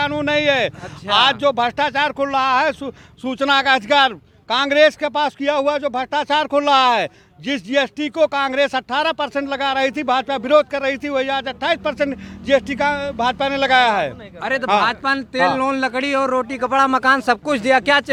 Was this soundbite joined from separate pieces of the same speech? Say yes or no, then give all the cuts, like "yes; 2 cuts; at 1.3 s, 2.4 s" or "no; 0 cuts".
no; 0 cuts